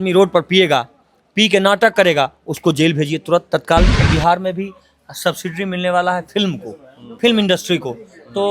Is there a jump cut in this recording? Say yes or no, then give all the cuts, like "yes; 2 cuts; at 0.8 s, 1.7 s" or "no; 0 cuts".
yes; 1 cut; at 4.0 s